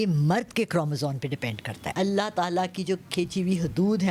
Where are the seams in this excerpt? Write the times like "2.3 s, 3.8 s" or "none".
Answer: 1.8 s